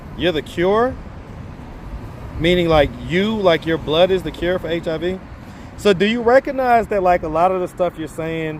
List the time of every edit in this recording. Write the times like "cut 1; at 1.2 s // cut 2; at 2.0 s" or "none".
none

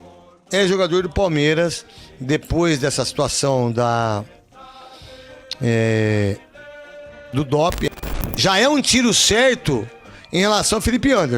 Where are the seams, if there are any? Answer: cut 1; at 7.9 s

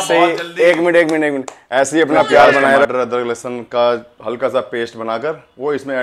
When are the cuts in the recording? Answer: cut 1; at 2.9 s

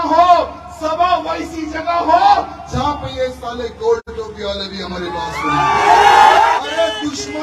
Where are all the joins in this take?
cut 1; at 6.5 s

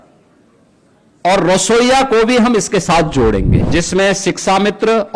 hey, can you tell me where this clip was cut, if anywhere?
cut 1; at 3.6 s

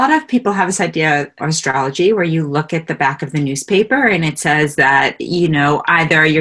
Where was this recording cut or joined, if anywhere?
cut 1; at 1.4 s

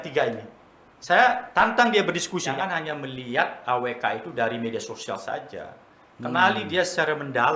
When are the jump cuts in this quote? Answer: cut 1; at 2.5 s

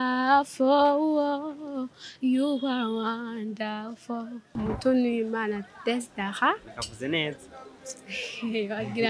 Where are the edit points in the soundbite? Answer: cut 1; at 4.5 s

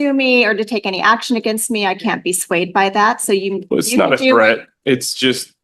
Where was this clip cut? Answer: none

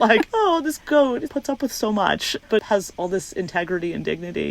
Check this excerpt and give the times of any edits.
cut 1; at 2.3 s

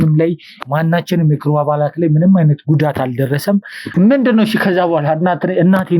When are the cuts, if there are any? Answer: cut 1; at 3.8 s

